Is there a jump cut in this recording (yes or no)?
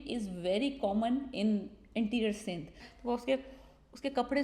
yes